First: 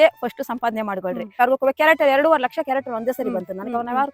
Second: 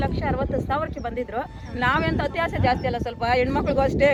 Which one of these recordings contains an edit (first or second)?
first